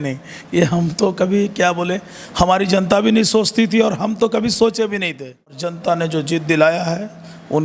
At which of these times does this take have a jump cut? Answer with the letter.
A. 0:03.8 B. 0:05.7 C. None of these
B